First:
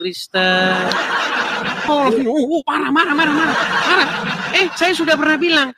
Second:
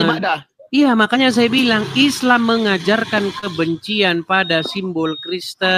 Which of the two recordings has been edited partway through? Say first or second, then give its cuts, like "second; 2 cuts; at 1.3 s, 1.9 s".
first; 1 cut; at 1.9 s